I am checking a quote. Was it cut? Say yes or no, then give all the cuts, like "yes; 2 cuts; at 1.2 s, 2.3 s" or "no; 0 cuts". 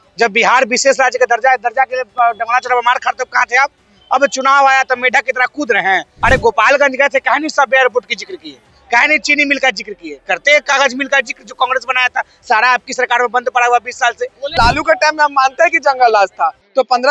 yes; 2 cuts; at 6.1 s, 14.5 s